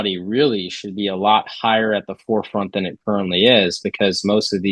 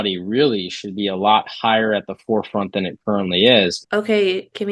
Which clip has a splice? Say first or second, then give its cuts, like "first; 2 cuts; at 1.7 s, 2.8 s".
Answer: second; 1 cut; at 3.8 s